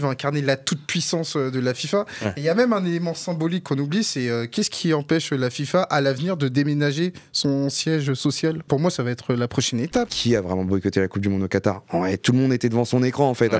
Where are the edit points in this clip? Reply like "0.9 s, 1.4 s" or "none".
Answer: 8.7 s, 10.2 s